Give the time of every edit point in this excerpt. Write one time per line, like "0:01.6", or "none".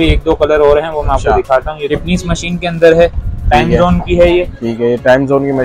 0:01.9